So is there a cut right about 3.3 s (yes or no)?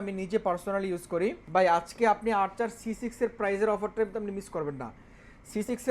no